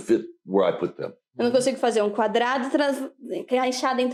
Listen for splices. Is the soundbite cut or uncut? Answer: uncut